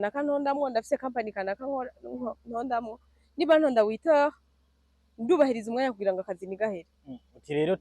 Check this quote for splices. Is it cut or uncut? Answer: uncut